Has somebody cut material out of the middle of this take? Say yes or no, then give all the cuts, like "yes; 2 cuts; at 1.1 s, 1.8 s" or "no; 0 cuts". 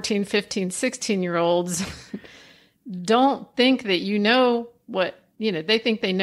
no; 0 cuts